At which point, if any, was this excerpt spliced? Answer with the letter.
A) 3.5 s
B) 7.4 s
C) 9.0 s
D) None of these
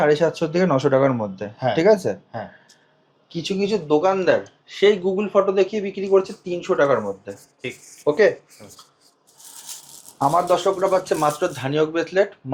D